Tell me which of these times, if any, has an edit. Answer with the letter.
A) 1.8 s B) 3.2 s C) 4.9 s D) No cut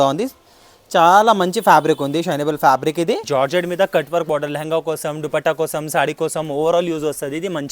B